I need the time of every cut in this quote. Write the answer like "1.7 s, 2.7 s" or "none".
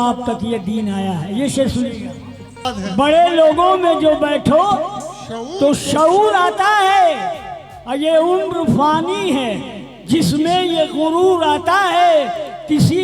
2.6 s